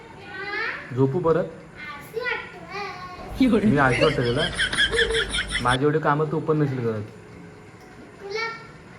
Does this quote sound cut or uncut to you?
uncut